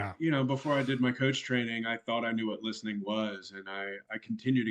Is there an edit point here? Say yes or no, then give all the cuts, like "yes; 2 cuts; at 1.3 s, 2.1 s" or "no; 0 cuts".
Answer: no; 0 cuts